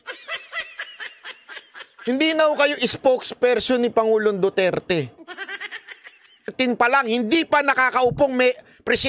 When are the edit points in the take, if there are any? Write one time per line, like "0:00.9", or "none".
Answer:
0:06.5

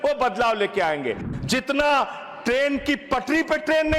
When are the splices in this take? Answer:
0:01.2

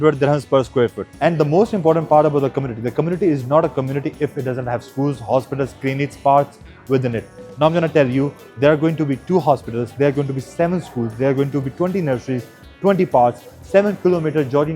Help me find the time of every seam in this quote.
0:01.1

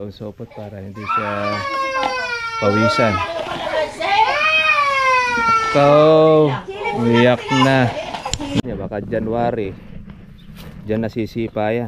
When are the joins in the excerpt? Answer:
0:08.7

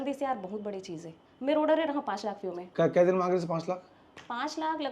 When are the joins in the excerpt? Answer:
none

